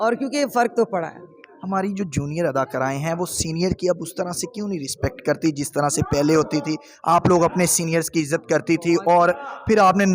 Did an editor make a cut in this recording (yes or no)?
no